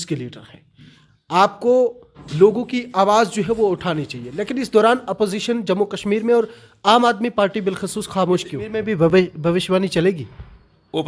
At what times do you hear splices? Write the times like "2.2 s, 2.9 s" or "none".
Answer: 9.1 s